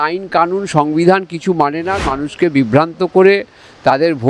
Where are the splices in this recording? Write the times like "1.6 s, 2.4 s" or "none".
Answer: 2.1 s